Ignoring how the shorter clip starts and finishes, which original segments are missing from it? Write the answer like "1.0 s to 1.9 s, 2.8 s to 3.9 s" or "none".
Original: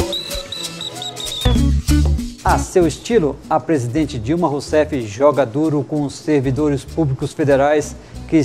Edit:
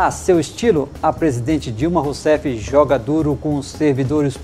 none